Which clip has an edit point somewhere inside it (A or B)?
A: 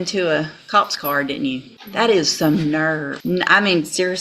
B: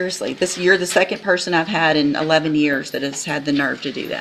A